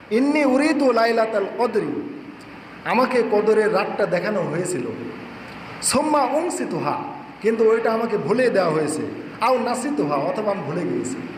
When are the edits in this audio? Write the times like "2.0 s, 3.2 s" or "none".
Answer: none